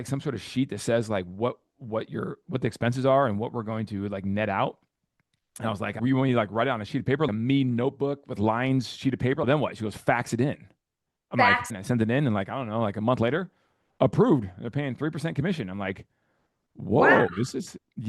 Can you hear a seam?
yes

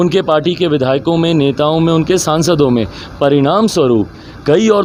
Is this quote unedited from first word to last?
yes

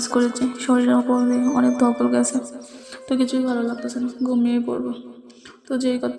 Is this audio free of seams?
yes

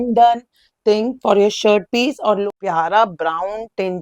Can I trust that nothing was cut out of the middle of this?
no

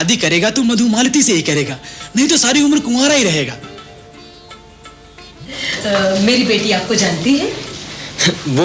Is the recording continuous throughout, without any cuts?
yes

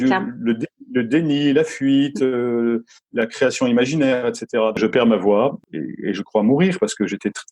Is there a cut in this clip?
yes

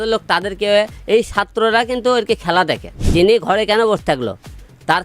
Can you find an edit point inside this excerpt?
yes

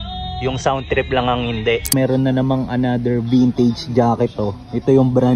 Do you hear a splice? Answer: yes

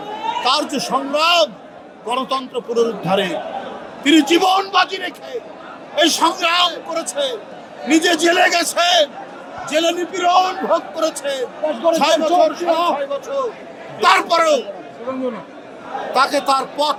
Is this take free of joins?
yes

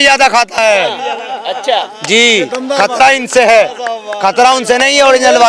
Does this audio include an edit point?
no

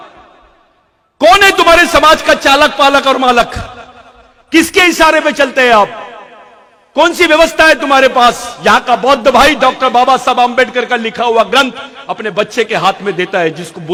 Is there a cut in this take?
no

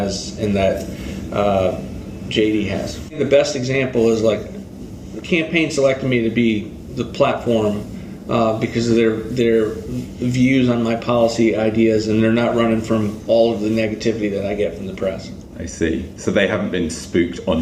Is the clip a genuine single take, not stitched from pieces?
yes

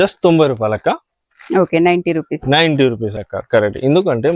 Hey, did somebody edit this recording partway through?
yes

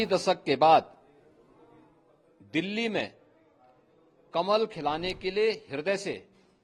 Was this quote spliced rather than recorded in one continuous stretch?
no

